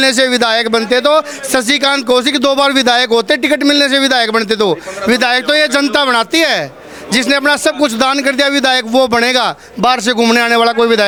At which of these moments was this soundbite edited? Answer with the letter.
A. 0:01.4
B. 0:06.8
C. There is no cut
C